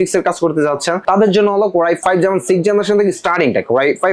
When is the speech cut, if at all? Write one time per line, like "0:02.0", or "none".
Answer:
0:01.0
0:02.0